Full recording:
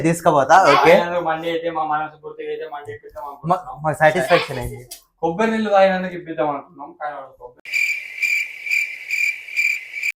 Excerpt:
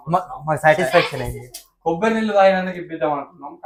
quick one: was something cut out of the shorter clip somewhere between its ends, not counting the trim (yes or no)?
no